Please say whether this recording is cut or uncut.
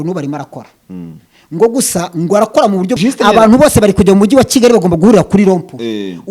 cut